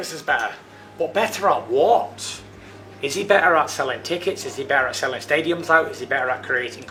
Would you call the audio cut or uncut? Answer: uncut